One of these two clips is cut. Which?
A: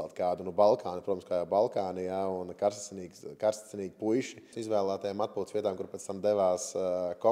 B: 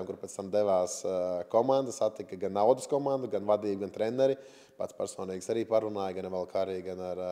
A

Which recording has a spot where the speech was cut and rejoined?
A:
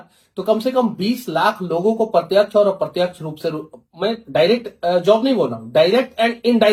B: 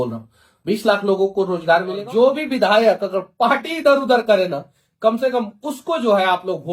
B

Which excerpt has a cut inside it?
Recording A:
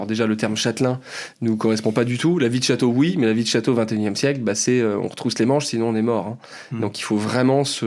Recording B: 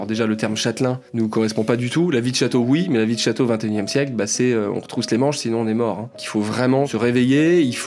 B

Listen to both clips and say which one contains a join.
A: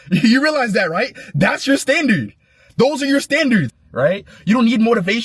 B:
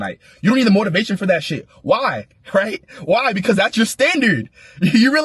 A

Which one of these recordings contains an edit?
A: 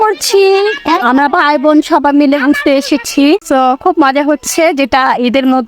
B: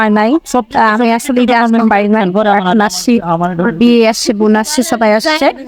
A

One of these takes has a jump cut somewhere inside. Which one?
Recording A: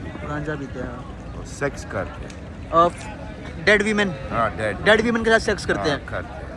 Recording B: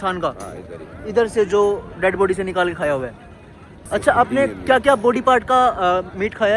B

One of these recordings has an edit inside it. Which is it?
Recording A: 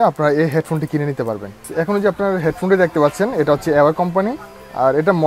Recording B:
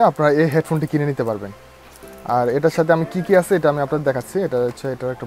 A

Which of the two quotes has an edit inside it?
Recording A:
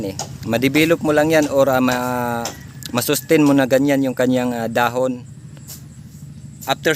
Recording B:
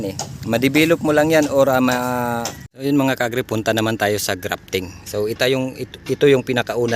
B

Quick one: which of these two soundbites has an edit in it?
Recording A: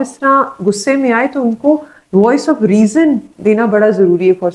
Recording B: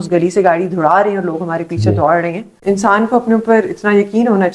B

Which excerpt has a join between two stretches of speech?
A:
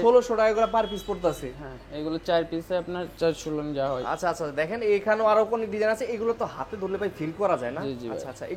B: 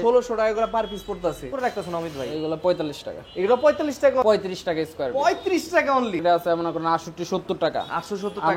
B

